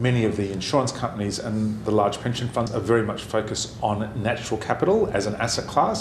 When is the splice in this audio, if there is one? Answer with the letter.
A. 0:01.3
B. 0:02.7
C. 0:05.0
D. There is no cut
B